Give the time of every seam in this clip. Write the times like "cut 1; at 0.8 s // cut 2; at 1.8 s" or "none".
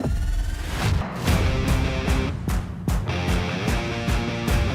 cut 1; at 1.0 s